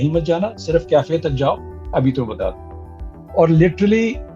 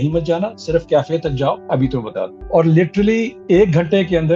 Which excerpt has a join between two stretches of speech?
second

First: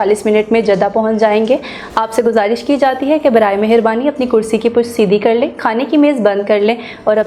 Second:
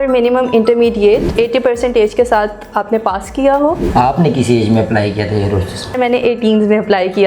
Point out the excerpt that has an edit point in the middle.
second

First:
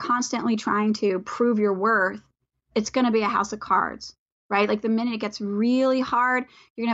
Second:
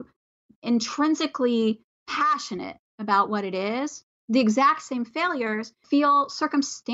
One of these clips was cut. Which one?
second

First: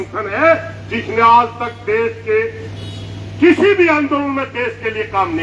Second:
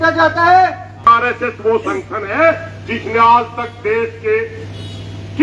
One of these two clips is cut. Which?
second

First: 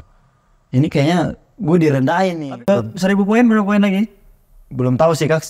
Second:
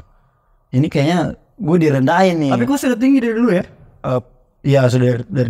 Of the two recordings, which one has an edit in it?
first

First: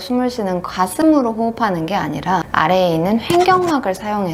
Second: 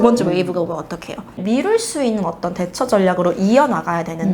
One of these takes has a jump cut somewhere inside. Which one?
second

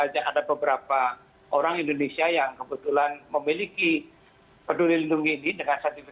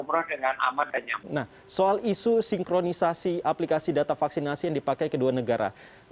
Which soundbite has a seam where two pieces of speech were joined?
second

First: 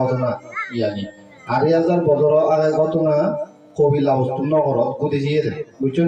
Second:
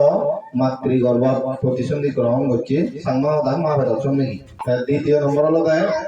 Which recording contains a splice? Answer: second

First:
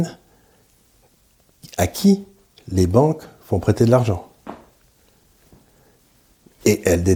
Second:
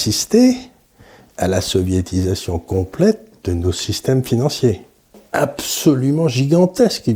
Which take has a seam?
second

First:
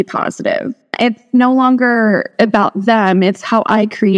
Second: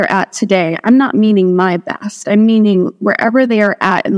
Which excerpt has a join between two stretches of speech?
first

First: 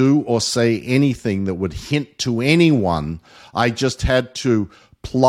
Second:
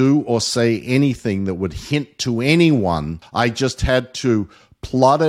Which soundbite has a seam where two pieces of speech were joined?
second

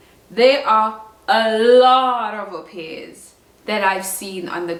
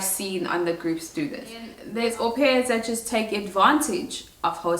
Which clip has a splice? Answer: second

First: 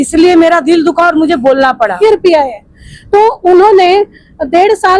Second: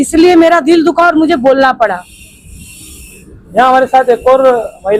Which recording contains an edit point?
first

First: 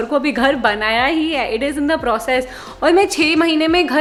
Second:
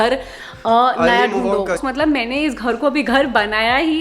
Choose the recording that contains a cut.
second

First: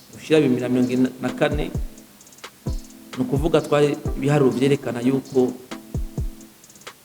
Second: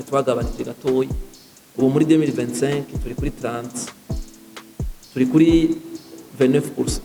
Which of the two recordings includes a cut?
first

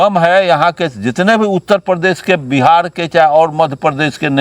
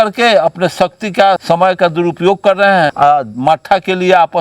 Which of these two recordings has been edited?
second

